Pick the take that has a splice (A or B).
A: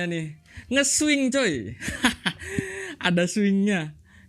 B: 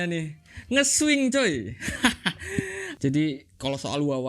B